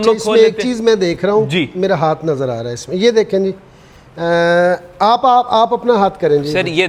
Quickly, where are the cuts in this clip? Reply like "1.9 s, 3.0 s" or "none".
none